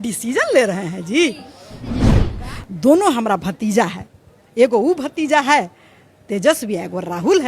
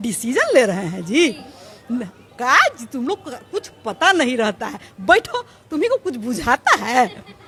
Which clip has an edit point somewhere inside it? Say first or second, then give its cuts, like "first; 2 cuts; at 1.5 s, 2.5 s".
first; 1 cut; at 2.2 s